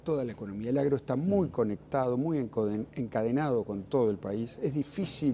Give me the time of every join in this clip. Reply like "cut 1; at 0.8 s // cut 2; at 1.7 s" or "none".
none